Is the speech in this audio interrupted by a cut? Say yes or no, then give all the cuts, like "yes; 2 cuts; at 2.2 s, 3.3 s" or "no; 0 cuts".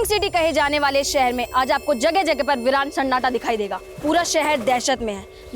yes; 1 cut; at 3.8 s